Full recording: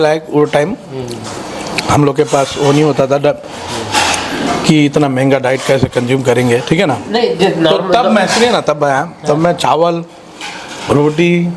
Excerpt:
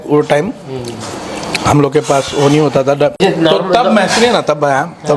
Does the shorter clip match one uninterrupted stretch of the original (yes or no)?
no